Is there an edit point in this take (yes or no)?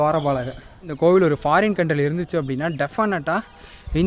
yes